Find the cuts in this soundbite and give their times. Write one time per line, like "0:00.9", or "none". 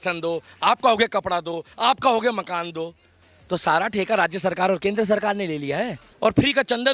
0:06.0